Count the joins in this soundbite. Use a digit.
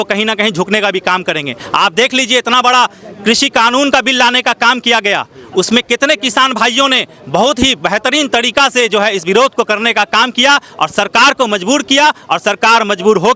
0